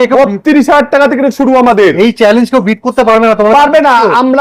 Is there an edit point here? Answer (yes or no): no